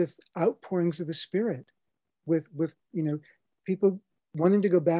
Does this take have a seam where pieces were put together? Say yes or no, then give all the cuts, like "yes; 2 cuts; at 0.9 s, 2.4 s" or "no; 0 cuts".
no; 0 cuts